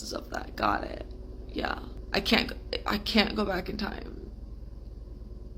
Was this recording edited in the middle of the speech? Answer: yes; 1 cut; at 1.9 s

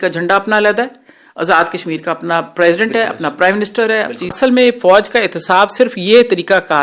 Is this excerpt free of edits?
no; 1 cut; at 4.3 s

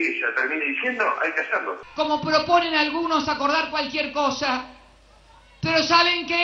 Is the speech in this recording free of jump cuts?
no; 1 cut; at 1.8 s

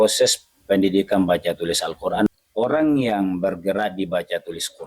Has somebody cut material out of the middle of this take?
yes; 1 cut; at 2.3 s

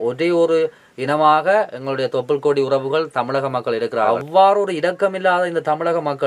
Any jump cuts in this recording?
yes; 1 cut; at 4.1 s

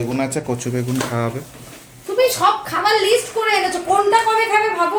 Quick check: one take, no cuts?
yes; 0 cuts

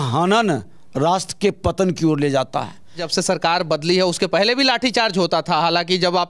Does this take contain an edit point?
no; 0 cuts

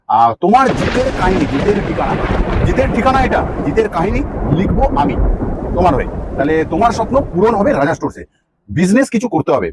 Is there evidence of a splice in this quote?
no; 0 cuts

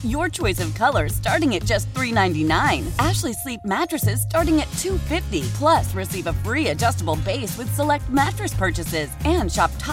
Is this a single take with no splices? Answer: yes; 0 cuts

